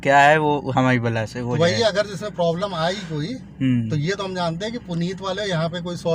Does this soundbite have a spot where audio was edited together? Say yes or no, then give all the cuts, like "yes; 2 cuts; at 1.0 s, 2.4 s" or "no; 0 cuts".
no; 0 cuts